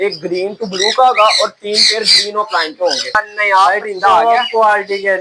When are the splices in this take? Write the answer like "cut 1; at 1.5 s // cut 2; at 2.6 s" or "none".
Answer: cut 1; at 3.2 s